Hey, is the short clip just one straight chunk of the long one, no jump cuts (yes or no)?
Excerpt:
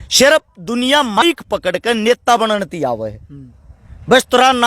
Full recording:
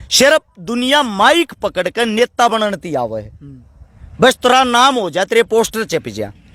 no